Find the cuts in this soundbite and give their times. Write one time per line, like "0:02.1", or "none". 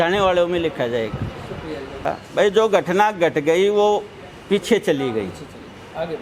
0:02.1